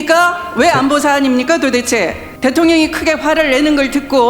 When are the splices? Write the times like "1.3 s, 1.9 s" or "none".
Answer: 2.2 s